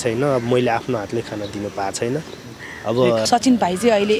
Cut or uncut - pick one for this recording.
cut